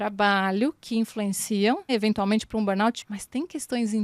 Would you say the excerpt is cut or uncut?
cut